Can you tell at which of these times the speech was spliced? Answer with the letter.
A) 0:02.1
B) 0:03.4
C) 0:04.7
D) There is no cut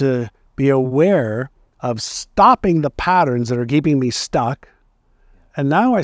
D